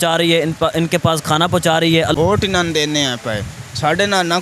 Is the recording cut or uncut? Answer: cut